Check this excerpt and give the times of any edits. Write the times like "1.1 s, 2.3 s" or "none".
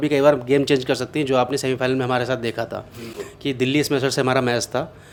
none